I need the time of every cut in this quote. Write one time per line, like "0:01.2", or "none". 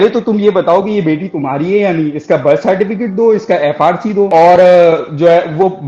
none